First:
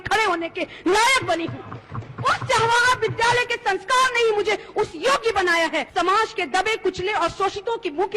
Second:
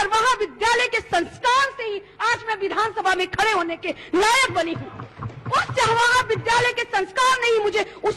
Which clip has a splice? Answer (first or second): first